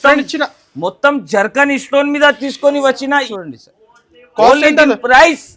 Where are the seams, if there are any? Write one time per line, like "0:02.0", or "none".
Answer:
0:03.3